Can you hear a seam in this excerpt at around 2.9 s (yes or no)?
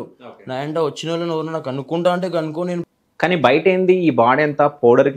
yes